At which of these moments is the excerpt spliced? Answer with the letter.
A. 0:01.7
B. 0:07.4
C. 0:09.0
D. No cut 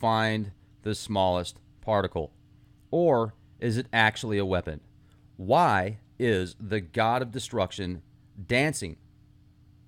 B